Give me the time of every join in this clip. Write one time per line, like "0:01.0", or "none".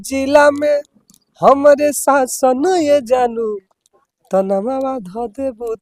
none

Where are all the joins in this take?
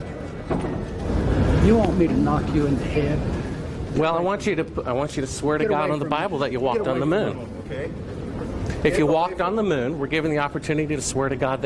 0:01.0

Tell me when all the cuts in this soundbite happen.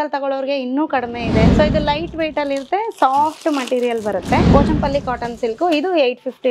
0:01.5
0:04.5

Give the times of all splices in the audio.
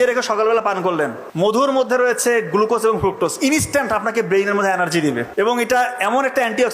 0:01.6
0:05.3

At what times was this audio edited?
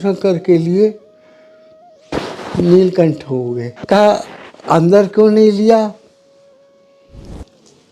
0:03.7

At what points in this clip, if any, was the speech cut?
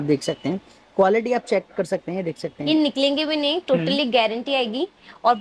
none

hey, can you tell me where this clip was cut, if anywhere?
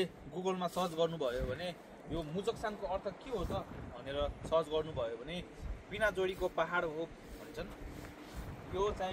none

